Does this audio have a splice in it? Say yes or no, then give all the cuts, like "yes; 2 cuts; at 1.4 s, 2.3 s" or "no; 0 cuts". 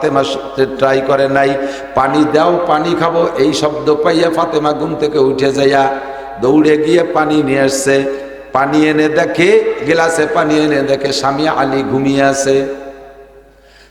no; 0 cuts